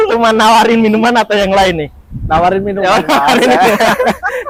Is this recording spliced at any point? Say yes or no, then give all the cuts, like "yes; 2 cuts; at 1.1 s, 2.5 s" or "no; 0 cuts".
no; 0 cuts